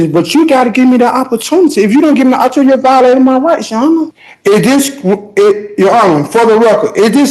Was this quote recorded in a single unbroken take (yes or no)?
no